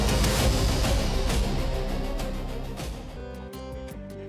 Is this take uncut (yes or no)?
no